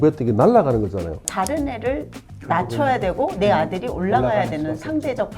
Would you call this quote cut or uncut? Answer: cut